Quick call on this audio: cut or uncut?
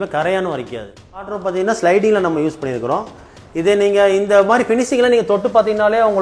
cut